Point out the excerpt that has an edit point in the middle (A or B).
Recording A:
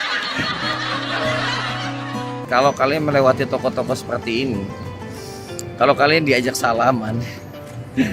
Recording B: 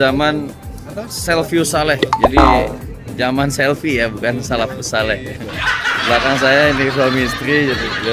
A